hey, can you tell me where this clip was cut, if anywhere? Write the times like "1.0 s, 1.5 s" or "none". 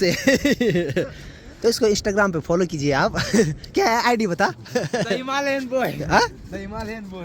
none